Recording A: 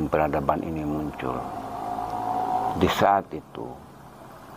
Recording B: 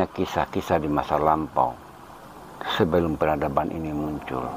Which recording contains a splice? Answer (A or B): A